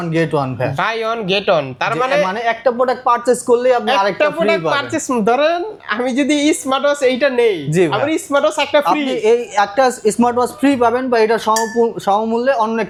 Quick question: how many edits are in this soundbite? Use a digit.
0